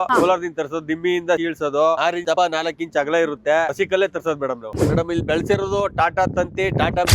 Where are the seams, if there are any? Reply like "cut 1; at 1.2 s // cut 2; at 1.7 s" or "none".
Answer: cut 1; at 3.7 s // cut 2; at 4.7 s